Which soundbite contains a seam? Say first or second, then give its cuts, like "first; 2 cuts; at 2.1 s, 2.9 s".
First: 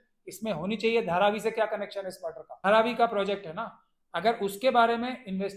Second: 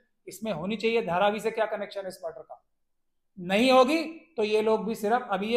first; 1 cut; at 2.5 s